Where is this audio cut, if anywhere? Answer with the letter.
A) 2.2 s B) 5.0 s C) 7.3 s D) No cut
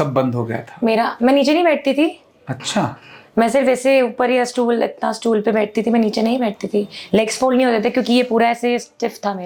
D